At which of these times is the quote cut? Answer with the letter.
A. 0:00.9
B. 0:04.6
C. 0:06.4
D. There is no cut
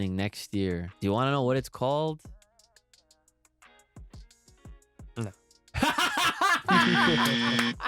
A